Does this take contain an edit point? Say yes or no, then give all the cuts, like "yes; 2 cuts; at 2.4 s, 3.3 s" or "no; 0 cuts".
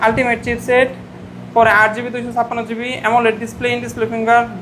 no; 0 cuts